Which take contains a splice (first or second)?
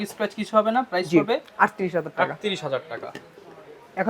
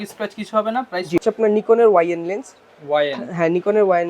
second